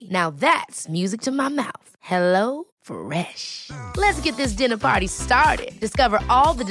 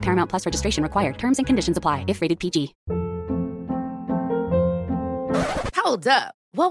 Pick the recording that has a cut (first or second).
second